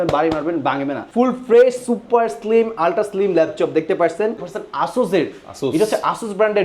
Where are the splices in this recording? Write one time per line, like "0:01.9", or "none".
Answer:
0:01.0
0:04.5